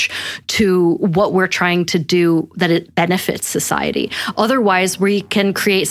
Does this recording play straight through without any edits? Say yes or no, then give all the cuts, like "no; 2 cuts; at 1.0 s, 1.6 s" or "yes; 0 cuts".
yes; 0 cuts